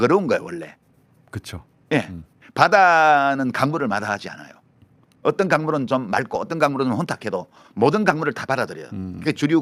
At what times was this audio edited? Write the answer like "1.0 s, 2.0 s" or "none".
none